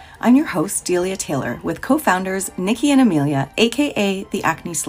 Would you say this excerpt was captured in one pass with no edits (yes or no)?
yes